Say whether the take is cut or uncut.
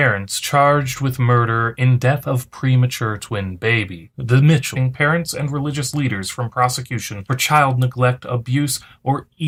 uncut